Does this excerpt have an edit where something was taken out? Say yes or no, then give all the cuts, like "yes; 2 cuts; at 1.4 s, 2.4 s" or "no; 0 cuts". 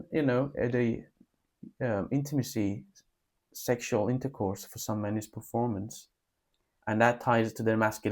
no; 0 cuts